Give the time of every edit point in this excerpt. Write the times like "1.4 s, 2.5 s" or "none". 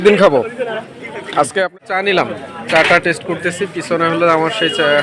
1.5 s

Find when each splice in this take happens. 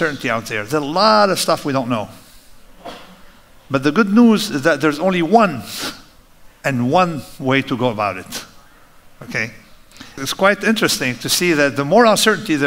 10.1 s

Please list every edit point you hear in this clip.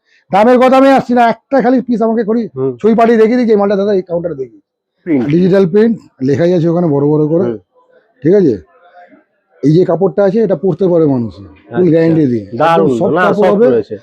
5.1 s

